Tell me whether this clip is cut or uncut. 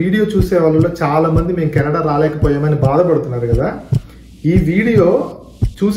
uncut